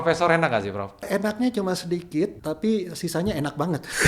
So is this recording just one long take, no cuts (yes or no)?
no